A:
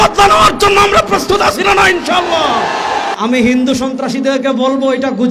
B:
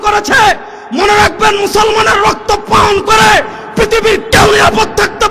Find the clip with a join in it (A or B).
A